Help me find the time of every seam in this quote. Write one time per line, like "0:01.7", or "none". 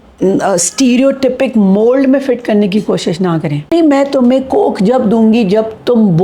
0:03.7